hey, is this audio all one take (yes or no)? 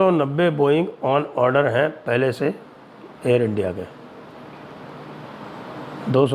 yes